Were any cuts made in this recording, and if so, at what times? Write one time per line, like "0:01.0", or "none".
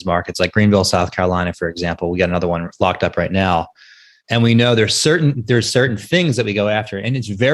none

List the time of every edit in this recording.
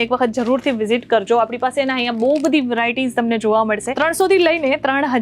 0:03.9

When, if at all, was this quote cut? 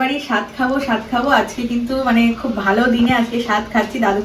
none

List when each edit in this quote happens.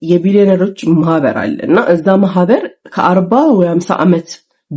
none

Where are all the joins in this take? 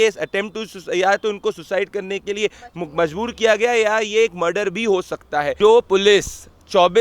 0:05.5

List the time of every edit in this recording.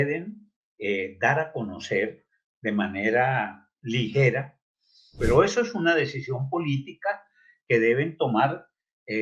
0:05.2

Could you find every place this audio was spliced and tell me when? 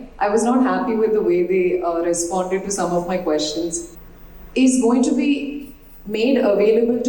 0:03.9

